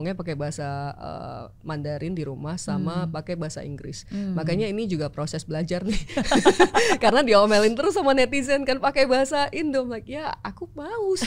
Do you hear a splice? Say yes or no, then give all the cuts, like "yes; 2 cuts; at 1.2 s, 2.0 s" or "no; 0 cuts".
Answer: no; 0 cuts